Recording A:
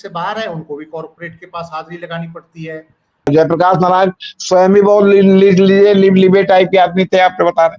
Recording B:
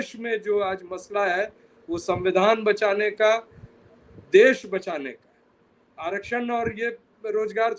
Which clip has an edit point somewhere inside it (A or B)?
A